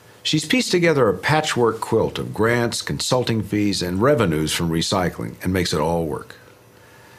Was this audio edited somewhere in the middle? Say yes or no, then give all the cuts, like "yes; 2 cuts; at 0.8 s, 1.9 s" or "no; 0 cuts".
yes; 1 cut; at 4.2 s